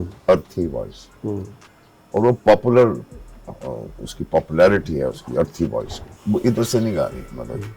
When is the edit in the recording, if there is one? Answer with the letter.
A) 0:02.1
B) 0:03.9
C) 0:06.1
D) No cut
C